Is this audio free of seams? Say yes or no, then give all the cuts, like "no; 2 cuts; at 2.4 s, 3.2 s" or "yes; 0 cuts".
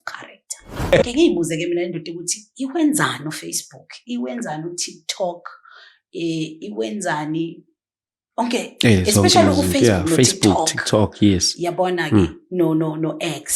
no; 1 cut; at 1.0 s